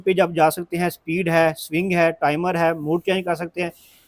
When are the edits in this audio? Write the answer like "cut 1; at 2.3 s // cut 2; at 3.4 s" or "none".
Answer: none